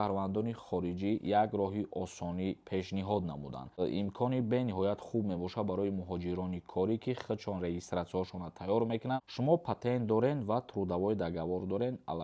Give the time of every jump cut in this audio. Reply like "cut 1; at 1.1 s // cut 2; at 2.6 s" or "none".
cut 1; at 3.8 s // cut 2; at 9.2 s